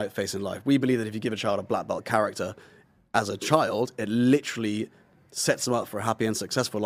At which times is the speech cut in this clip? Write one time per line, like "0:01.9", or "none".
none